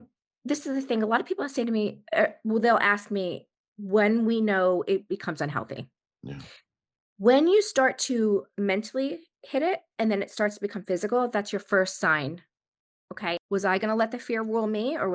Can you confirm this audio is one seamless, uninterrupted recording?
no; 1 cut; at 13.4 s

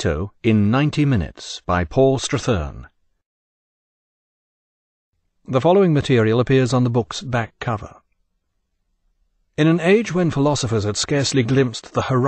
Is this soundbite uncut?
yes; 0 cuts

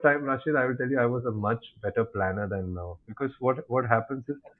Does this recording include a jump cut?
no; 0 cuts

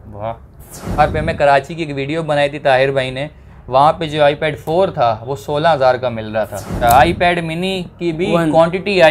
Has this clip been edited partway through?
yes; 2 cuts; at 1.0 s, 6.7 s

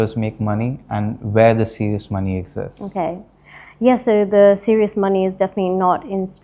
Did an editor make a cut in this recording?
no; 0 cuts

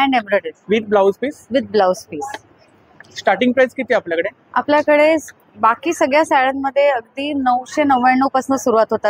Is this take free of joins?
yes; 0 cuts

